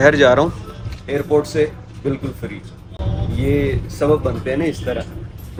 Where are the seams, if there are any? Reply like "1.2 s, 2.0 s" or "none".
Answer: none